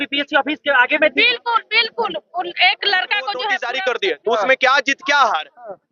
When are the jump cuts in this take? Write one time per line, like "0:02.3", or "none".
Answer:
0:03.6